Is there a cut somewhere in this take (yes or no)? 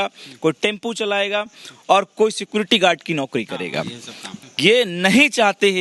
yes